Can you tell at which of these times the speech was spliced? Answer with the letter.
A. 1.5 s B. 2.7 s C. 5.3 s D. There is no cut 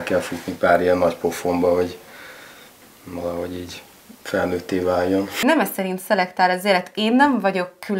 C